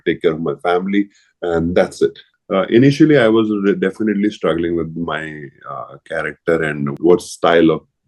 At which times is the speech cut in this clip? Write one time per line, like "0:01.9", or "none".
0:02.3
0:07.0